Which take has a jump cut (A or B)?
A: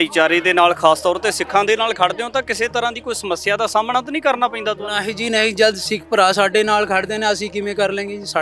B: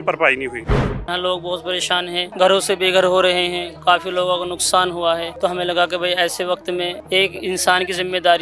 B